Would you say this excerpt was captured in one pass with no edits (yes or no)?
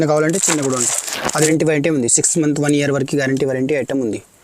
no